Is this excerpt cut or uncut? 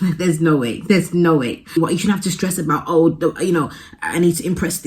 cut